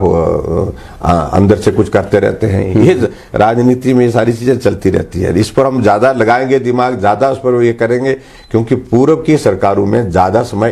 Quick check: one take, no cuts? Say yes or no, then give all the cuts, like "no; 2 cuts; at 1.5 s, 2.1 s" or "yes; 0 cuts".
yes; 0 cuts